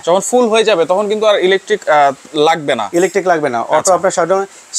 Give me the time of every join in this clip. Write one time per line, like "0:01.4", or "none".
none